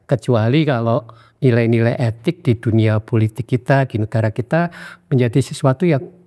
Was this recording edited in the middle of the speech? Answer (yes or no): no